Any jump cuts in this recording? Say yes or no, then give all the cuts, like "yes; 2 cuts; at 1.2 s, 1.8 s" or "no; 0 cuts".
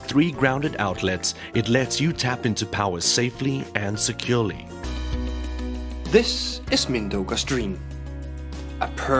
yes; 1 cut; at 4.8 s